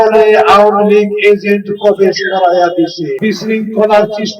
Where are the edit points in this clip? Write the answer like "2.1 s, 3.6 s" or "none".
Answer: 3.1 s